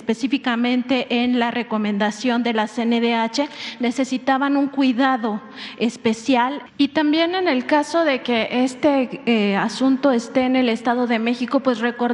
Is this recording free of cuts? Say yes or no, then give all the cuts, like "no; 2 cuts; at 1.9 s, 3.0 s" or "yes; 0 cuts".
no; 1 cut; at 6.6 s